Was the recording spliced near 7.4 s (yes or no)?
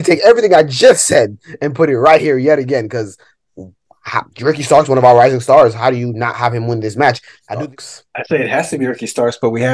yes